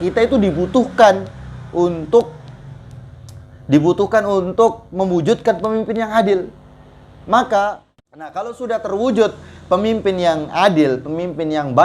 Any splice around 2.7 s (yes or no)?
no